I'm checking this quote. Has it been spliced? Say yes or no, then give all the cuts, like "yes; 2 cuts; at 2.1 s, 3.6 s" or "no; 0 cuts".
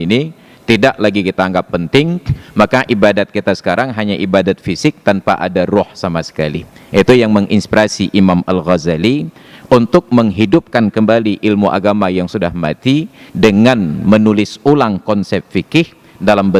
no; 0 cuts